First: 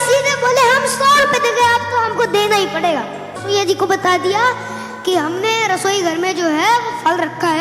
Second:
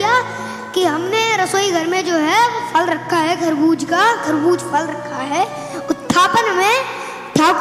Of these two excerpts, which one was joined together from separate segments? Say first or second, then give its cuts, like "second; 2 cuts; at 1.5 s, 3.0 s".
first; 1 cut; at 3.3 s